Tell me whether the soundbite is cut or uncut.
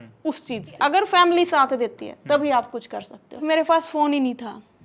cut